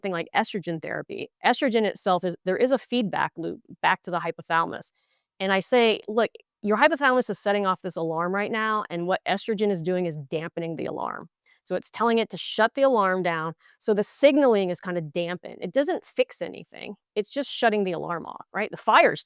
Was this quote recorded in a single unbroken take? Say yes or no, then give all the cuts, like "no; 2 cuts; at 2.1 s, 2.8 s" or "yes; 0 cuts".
yes; 0 cuts